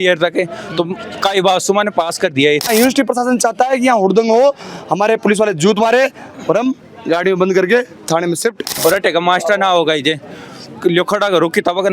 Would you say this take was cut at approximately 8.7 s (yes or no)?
yes